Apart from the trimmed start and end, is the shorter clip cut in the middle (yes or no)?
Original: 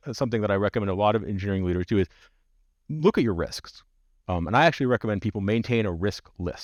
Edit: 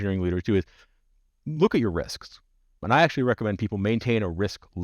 yes